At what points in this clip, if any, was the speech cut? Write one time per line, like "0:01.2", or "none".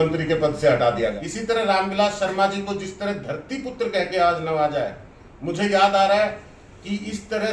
0:01.2